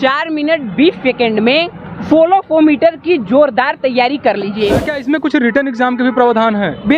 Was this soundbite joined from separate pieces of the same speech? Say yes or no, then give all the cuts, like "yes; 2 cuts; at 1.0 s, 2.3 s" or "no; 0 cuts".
yes; 1 cut; at 4.9 s